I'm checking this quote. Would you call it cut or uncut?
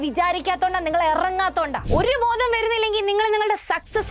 uncut